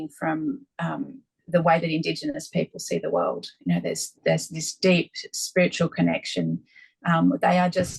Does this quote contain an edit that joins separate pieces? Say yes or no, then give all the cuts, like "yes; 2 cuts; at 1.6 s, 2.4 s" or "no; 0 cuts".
no; 0 cuts